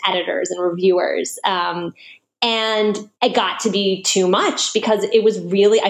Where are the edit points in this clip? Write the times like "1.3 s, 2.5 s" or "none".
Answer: 3.1 s